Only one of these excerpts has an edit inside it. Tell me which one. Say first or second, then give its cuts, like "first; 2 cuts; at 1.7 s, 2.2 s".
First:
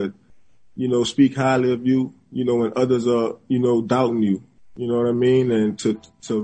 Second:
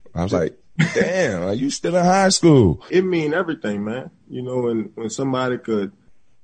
second; 1 cut; at 2.9 s